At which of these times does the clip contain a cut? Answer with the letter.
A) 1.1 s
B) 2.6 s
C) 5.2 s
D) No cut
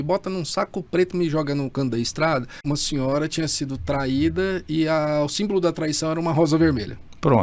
B